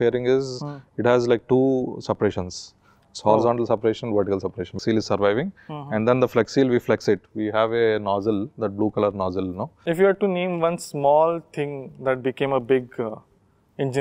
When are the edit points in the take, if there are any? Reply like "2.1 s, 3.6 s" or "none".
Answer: 4.8 s, 9.7 s